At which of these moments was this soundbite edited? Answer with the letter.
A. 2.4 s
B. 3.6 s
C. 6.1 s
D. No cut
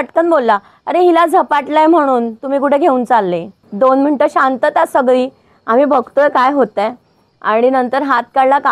B